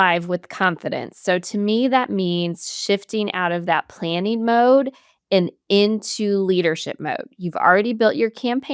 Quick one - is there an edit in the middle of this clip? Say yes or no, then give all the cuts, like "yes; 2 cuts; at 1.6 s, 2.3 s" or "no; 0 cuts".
no; 0 cuts